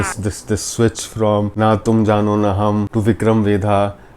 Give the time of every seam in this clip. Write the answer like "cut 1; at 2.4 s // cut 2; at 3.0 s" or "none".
cut 1; at 1.5 s // cut 2; at 2.9 s